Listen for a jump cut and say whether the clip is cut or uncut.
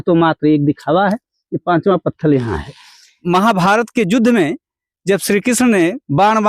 cut